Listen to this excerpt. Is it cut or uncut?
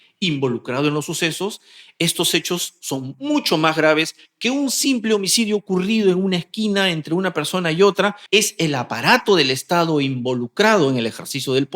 cut